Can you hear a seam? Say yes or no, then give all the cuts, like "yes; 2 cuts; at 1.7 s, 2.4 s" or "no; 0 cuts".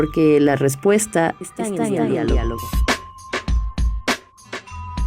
yes; 2 cuts; at 2.6 s, 4.2 s